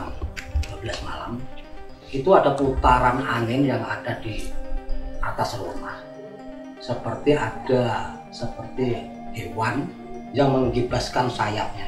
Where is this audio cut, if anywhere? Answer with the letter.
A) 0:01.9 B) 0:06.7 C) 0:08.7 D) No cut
D